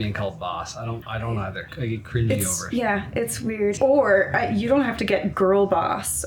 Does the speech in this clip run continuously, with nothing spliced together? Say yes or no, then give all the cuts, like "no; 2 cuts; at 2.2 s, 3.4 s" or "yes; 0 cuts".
no; 2 cuts; at 1.5 s, 3.8 s